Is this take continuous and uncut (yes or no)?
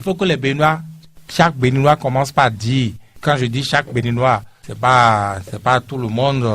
yes